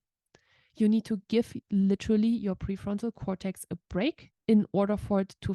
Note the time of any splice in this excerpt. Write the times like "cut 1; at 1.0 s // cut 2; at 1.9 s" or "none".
cut 1; at 4.3 s